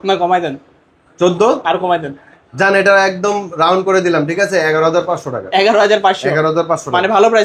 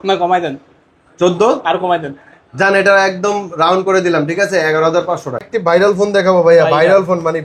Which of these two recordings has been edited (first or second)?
second